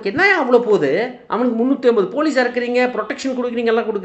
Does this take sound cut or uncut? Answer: uncut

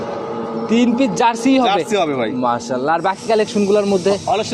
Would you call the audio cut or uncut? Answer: uncut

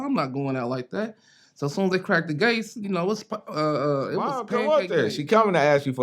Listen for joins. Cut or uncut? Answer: cut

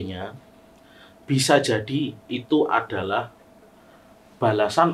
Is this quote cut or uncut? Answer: uncut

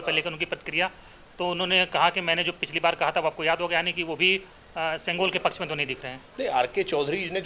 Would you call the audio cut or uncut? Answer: uncut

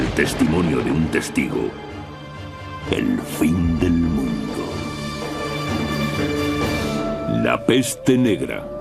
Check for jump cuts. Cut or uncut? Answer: cut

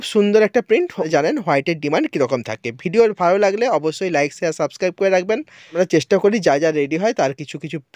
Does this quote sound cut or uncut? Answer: cut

